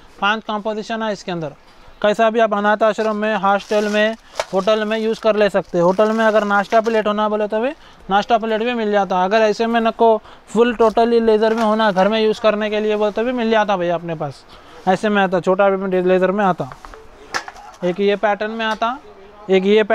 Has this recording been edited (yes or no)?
no